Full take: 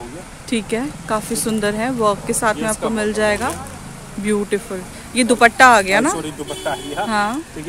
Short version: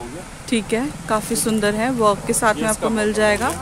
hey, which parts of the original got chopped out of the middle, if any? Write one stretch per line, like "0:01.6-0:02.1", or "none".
none